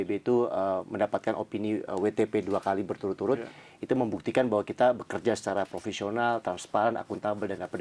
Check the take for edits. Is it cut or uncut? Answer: uncut